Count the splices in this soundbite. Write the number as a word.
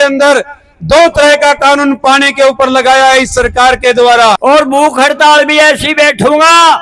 one